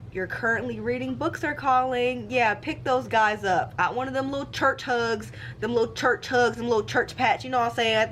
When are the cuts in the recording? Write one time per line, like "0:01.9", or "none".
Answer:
0:03.7